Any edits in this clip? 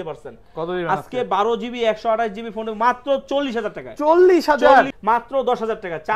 yes; 1 cut; at 4.9 s

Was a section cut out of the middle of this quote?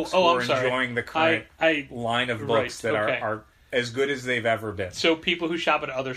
no; 0 cuts

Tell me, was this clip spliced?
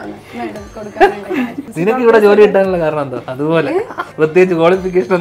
yes; 3 cuts; at 1.7 s, 3.2 s, 4.0 s

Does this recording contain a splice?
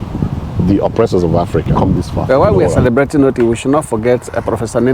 yes; 1 cut; at 1.7 s

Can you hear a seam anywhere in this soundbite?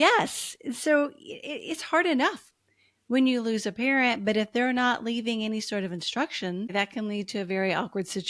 yes; 1 cut; at 6.7 s

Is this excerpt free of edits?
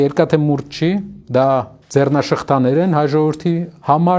no; 2 cuts; at 1.2 s, 1.8 s

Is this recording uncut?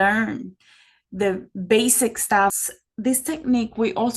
no; 1 cut; at 2.6 s

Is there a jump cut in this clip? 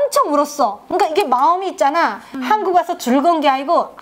no; 0 cuts

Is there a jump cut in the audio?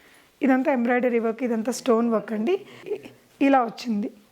yes; 1 cut; at 2.8 s

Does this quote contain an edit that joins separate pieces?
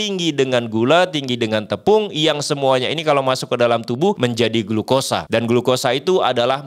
yes; 2 cuts; at 4.2 s, 5.2 s

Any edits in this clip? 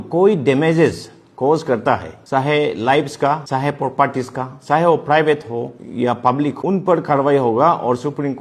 yes; 4 cuts; at 2.1 s, 3.4 s, 5.8 s, 6.5 s

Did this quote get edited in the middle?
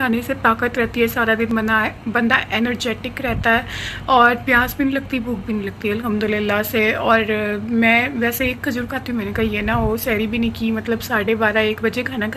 no; 0 cuts

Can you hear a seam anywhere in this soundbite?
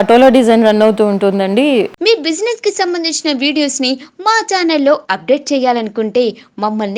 yes; 1 cut; at 1.9 s

